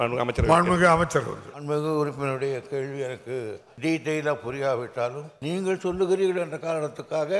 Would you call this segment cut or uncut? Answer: cut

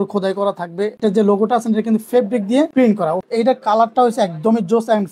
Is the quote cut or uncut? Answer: cut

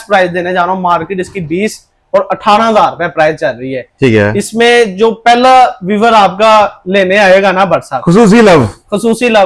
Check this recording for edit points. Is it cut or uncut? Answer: uncut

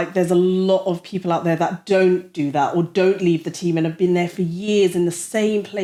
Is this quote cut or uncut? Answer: uncut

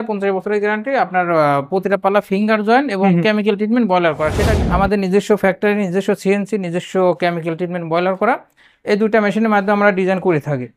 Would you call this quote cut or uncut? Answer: cut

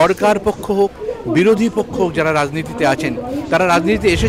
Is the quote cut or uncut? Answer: uncut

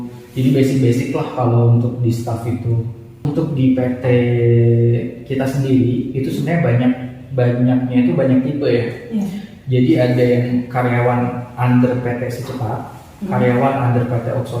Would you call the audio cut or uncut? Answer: cut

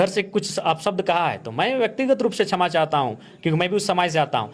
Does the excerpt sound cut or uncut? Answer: uncut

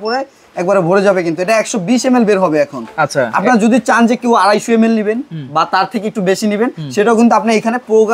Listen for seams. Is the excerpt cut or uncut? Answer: uncut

